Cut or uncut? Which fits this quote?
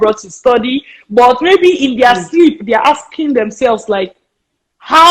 uncut